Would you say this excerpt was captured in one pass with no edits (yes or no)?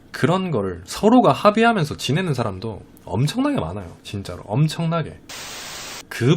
no